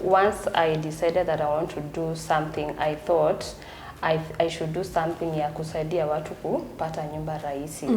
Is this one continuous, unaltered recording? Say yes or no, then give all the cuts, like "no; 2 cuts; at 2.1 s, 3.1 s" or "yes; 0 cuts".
yes; 0 cuts